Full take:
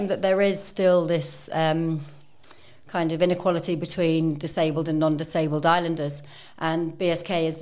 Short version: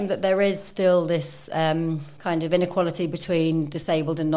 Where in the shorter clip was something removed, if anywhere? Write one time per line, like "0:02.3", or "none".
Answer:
0:02.1